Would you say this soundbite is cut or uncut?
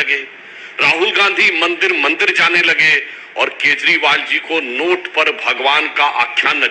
uncut